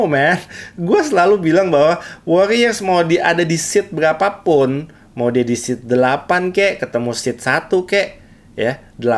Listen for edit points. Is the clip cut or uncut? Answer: uncut